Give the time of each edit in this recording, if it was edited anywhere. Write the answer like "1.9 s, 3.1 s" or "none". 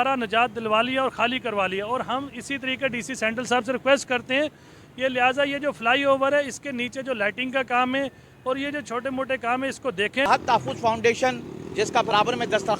10.3 s